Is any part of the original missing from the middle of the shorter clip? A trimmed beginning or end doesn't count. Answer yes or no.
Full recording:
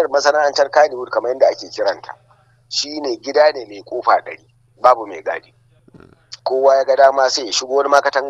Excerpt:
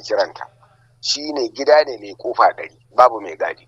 yes